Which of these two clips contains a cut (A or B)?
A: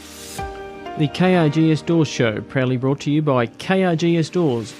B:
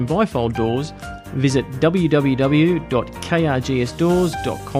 A